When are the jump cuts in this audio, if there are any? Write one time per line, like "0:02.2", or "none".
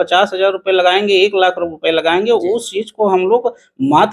none